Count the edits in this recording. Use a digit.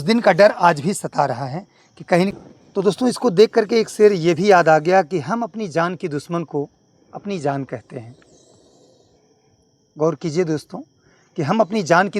1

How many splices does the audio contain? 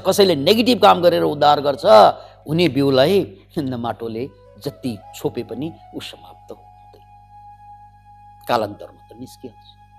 0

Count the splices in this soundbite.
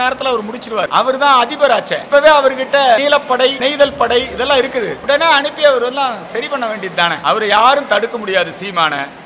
5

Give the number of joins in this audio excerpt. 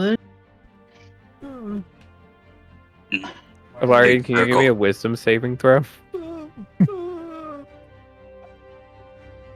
1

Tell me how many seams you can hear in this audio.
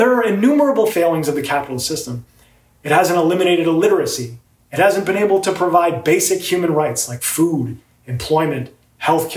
1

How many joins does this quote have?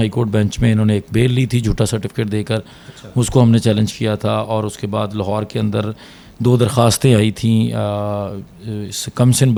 0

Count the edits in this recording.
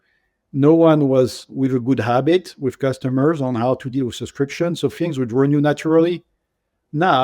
1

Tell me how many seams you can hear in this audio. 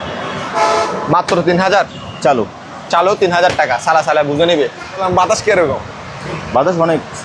1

